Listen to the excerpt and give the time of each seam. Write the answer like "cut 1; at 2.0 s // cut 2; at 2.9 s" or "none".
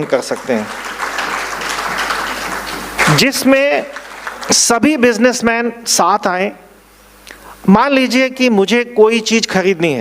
cut 1; at 3.0 s

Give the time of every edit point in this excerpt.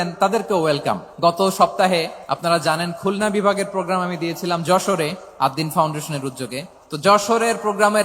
cut 1; at 1.1 s // cut 2; at 2.2 s // cut 3; at 5.2 s // cut 4; at 6.8 s

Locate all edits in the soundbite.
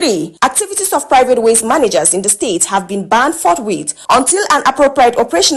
none

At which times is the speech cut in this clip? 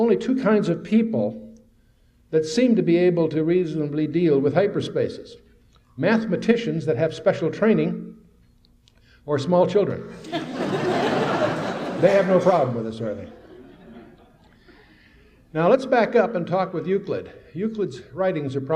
cut 1; at 2.9 s

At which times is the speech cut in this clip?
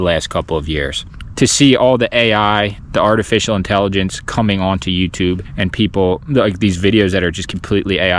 cut 1; at 1.0 s

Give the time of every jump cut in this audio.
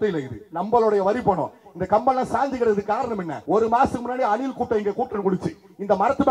cut 1; at 3.3 s

